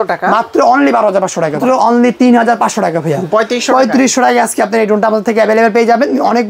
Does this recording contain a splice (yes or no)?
yes